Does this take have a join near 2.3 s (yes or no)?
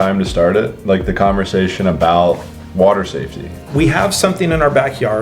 no